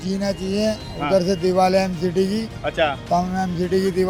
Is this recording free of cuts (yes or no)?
yes